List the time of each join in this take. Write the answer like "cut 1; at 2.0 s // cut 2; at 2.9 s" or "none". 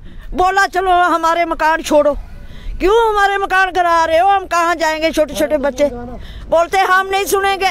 none